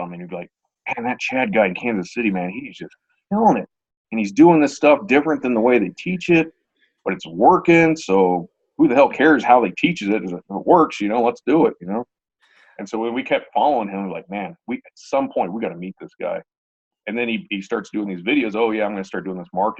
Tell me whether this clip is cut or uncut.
uncut